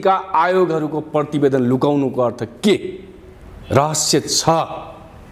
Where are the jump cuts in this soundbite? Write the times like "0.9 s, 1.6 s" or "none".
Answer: none